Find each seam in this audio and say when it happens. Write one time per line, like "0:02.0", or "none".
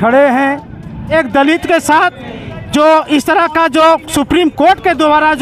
0:01.1